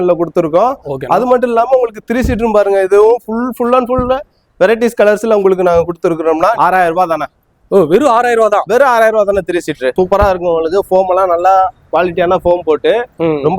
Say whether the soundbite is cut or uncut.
cut